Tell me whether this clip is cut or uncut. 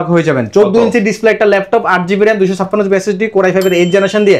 uncut